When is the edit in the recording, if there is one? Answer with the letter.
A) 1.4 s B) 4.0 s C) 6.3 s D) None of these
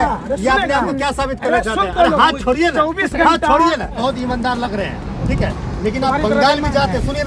B